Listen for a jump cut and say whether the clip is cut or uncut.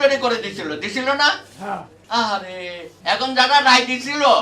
cut